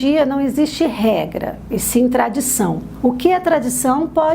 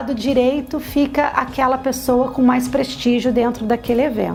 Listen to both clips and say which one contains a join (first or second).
first